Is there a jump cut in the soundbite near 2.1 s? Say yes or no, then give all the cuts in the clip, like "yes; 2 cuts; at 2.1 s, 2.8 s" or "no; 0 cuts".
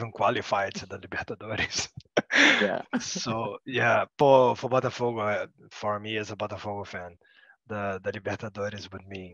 no; 1 cut; at 4.1 s